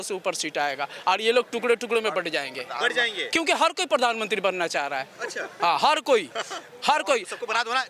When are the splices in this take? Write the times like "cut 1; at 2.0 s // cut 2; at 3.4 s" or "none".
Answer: none